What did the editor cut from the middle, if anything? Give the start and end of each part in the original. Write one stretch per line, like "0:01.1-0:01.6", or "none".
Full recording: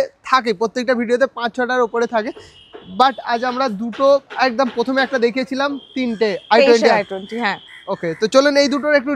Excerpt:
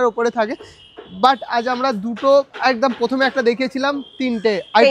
none